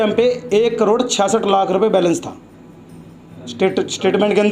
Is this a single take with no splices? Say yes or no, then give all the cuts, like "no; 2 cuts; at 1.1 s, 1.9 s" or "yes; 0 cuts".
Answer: yes; 0 cuts